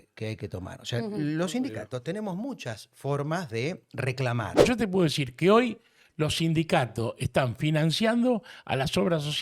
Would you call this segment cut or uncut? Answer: cut